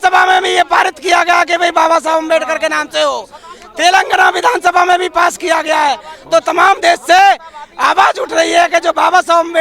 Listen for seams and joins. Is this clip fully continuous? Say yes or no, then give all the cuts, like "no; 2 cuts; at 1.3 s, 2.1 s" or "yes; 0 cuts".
yes; 0 cuts